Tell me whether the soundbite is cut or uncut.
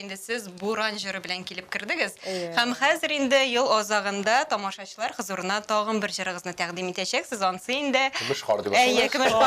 uncut